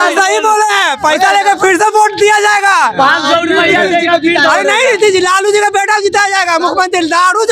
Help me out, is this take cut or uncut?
uncut